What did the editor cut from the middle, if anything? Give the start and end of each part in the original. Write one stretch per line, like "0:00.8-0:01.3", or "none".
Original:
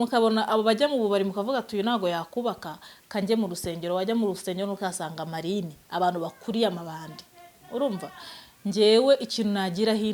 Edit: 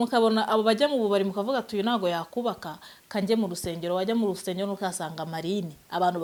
none